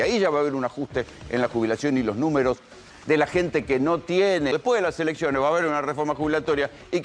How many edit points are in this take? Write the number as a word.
one